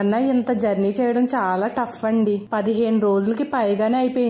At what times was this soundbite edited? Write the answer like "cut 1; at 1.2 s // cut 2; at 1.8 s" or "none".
none